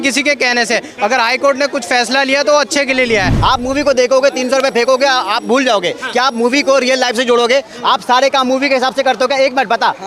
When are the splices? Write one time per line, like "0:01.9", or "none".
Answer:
0:03.3